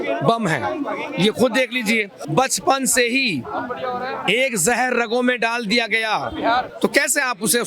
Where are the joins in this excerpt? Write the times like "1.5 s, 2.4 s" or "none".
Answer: 2.2 s, 6.7 s